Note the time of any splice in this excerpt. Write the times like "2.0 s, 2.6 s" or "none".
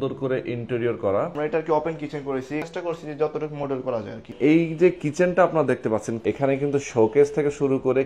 1.3 s, 2.7 s, 4.3 s, 6.1 s